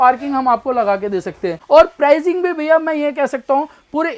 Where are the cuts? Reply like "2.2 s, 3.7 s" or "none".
1.6 s

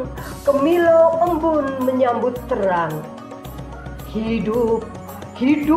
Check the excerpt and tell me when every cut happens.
none

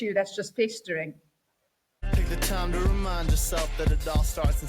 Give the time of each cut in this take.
2.0 s

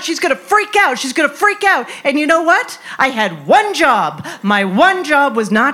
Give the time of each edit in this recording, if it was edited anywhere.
none

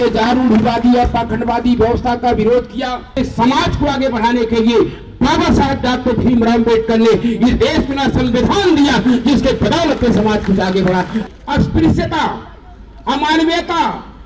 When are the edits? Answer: 3.2 s, 11.2 s

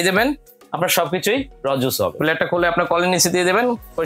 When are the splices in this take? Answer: 2.2 s

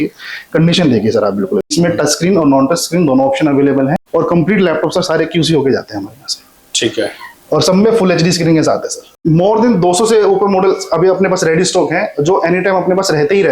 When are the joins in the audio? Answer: 1.7 s, 4.0 s, 9.2 s

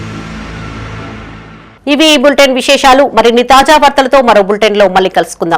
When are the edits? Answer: none

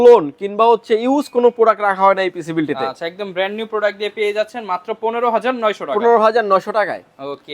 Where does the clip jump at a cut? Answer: none

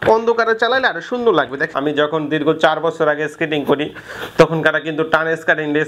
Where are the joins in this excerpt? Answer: 1.7 s

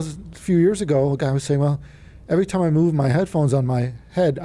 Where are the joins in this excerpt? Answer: none

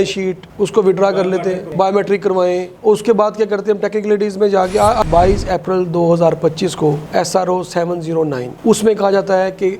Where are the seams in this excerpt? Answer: 5.0 s

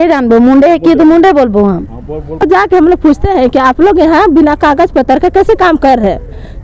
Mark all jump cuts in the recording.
2.4 s

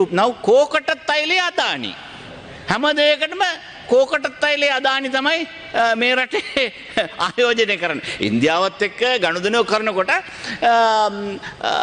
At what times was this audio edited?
none

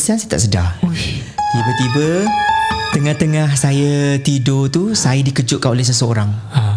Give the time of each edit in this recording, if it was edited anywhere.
1.2 s

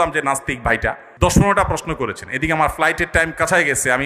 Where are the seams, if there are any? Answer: 1.1 s

